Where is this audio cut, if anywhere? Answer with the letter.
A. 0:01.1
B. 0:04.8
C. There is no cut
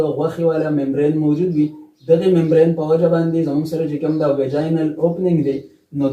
C